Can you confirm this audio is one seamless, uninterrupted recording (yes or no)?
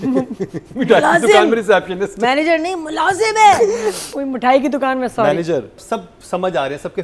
no